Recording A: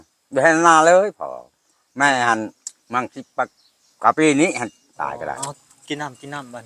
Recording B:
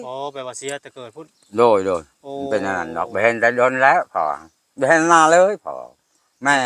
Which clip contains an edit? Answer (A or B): A